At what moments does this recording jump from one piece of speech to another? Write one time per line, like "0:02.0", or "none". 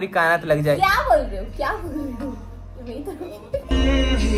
none